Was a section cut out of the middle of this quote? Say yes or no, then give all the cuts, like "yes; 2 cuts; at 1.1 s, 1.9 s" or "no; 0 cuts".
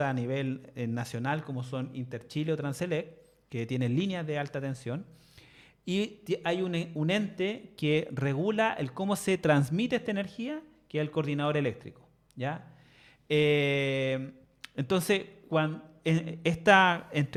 no; 0 cuts